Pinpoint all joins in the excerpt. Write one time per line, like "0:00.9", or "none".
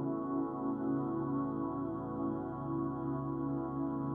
none